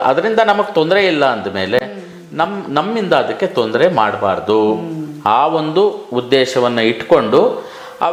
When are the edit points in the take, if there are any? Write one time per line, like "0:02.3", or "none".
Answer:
none